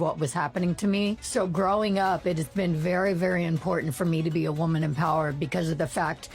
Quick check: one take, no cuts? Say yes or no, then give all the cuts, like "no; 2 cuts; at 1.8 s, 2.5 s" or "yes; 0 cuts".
no; 1 cut; at 1.2 s